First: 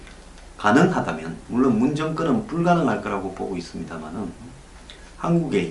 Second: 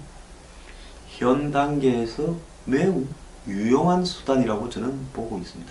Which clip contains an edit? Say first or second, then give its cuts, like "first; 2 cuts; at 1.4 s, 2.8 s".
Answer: second; 1 cut; at 4.6 s